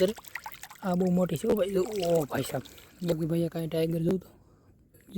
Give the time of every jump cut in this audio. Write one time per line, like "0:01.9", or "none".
0:03.1